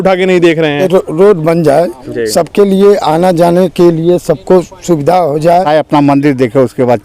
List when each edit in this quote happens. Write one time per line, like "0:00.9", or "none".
0:00.8
0:05.7